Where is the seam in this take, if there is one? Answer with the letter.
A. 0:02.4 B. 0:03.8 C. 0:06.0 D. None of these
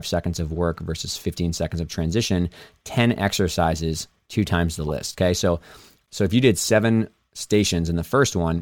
C